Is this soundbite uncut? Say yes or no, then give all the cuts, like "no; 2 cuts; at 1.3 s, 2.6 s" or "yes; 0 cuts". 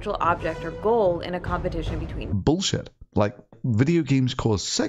yes; 0 cuts